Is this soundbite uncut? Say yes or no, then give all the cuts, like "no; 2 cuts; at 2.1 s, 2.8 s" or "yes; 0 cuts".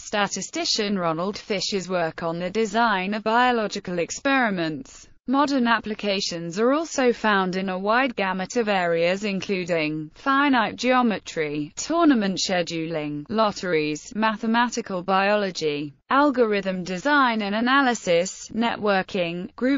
no; 1 cut; at 4.9 s